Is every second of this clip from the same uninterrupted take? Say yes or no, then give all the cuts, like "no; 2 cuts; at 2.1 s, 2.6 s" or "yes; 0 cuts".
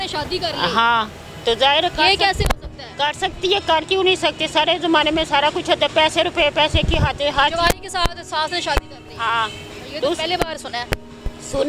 yes; 0 cuts